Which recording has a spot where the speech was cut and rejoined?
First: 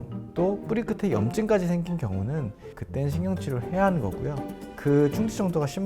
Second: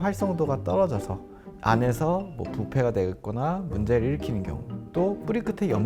first; 2 cuts; at 2.7 s, 4.8 s

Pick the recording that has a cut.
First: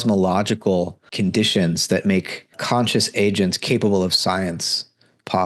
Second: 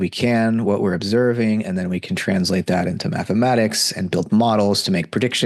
first; 2 cuts; at 1.0 s, 2.6 s

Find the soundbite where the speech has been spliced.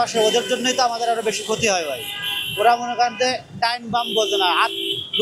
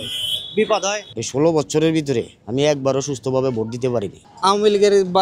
second; 2 cuts; at 1.1 s, 4.2 s

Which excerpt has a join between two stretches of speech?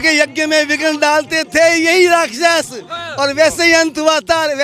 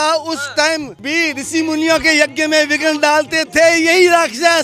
second; 1 cut; at 1.0 s

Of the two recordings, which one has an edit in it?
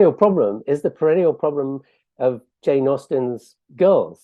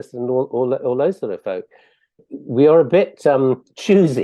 second; 1 cut; at 2.1 s

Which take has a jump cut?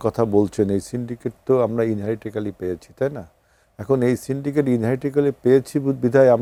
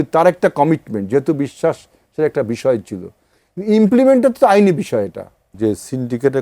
second; 1 cut; at 5.5 s

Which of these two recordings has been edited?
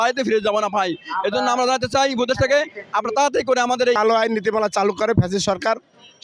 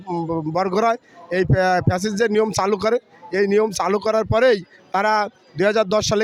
first; 1 cut; at 4.0 s

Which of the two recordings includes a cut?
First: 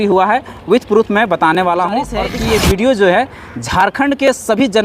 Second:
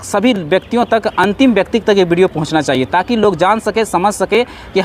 first; 1 cut; at 2.2 s

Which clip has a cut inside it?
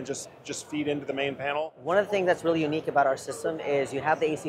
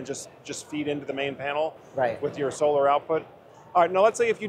first; 1 cut; at 1.7 s

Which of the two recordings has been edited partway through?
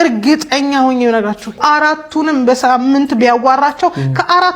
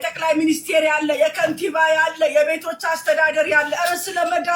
first; 1 cut; at 1.6 s

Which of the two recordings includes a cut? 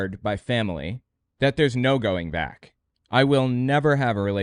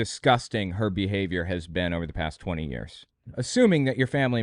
second; 1 cut; at 3.1 s

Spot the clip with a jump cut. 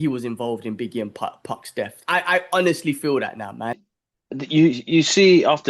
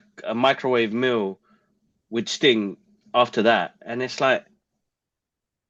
first; 1 cut; at 3.9 s

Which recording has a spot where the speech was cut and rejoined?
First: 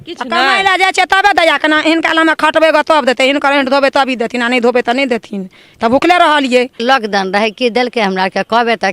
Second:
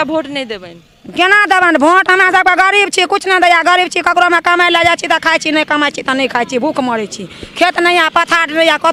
first; 1 cut; at 6.8 s

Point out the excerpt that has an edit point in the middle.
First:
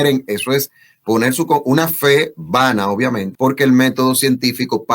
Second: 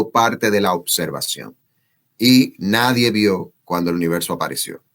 first; 1 cut; at 3.3 s

